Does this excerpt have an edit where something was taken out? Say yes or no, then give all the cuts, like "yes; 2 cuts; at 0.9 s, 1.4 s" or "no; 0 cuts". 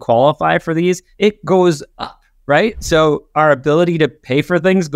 yes; 1 cut; at 1.1 s